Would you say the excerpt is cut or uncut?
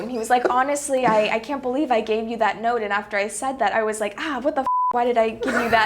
cut